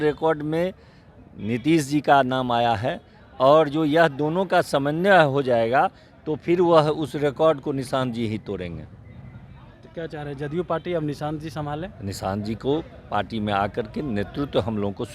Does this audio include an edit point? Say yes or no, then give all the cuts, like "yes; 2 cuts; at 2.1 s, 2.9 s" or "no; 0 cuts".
no; 0 cuts